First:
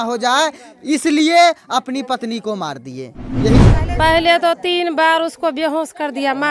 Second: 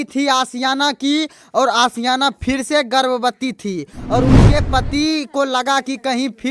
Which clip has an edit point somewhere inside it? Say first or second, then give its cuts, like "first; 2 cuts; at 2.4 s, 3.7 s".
first; 1 cut; at 3.6 s